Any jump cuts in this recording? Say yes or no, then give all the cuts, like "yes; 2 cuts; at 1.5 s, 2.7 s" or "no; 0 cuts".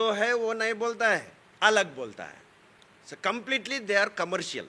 no; 0 cuts